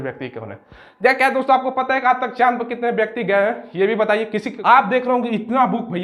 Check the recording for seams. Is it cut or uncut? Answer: cut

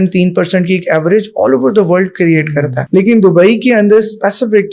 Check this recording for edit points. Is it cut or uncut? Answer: cut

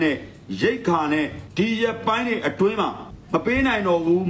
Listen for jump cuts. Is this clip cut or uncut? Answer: cut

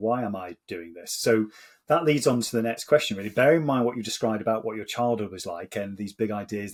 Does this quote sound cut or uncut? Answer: uncut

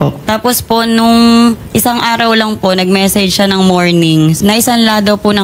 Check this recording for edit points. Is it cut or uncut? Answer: uncut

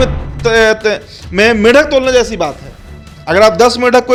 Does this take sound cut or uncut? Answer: uncut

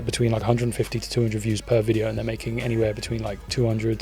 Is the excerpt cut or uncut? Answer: uncut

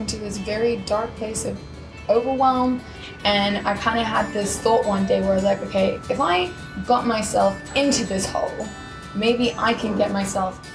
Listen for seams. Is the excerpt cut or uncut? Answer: cut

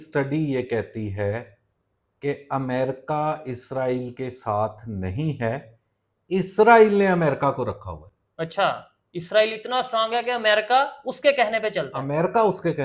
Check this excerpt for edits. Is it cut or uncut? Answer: uncut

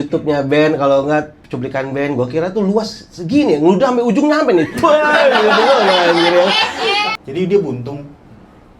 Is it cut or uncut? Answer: cut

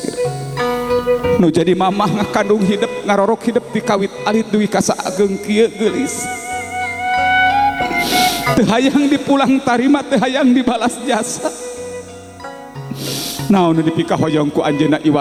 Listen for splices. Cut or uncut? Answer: uncut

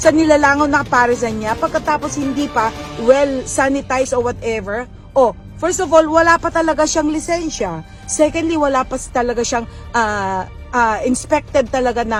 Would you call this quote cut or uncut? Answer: uncut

